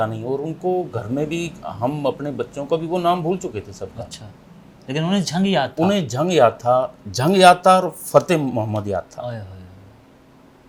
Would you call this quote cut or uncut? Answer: uncut